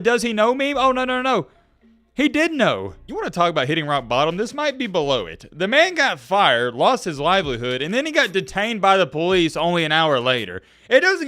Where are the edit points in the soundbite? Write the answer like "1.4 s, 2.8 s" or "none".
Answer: 2.9 s